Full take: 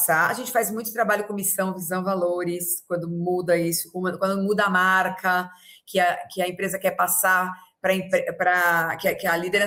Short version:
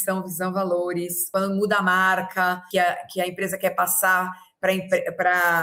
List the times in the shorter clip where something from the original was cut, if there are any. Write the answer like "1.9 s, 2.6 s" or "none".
1.3 s, 2.6 s